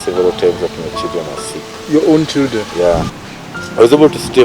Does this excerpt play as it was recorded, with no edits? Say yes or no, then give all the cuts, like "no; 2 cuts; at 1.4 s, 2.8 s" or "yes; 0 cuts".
no; 1 cut; at 3.2 s